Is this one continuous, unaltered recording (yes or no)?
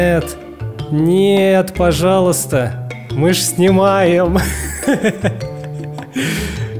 yes